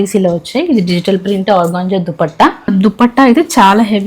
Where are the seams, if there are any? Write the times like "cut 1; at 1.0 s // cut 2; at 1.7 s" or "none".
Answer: cut 1; at 2.7 s